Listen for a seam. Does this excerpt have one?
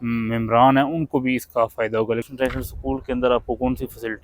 yes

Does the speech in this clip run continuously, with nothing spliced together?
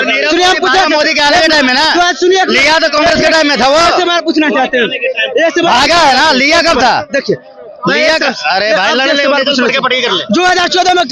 yes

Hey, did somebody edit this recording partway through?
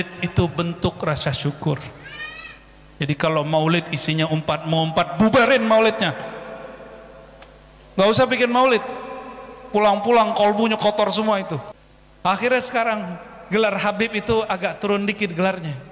yes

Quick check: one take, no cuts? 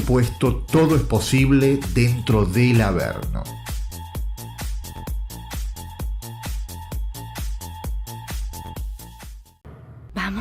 yes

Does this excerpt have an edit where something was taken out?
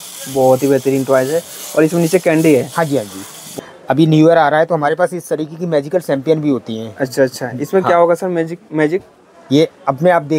yes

